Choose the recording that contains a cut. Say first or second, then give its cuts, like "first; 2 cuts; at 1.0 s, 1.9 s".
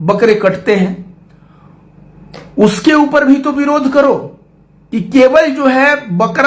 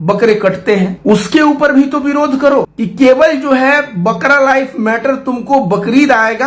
second; 2 cuts; at 1.0 s, 2.8 s